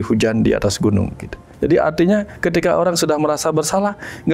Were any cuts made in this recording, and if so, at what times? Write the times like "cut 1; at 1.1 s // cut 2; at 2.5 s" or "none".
cut 1; at 1.4 s